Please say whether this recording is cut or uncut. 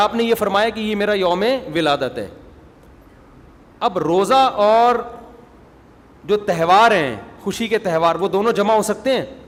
uncut